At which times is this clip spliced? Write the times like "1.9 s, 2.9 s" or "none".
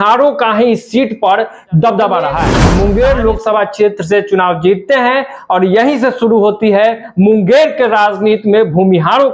2.6 s